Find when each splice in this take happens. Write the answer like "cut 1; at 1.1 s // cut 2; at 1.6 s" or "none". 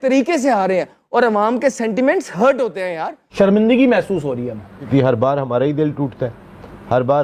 cut 1; at 3.3 s // cut 2; at 4.9 s